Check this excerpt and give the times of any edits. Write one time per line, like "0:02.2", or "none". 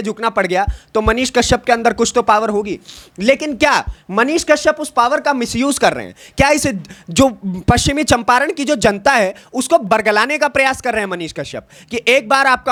none